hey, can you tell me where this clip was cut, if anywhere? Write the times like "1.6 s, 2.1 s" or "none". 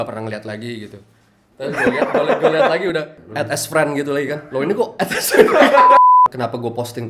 3.2 s, 5.8 s, 6.3 s